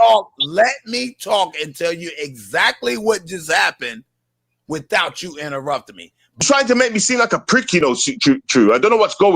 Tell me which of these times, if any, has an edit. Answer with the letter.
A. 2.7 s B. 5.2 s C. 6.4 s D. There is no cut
C